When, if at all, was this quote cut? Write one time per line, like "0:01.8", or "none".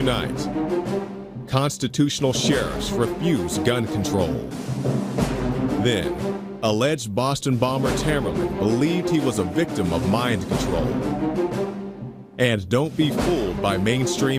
0:04.7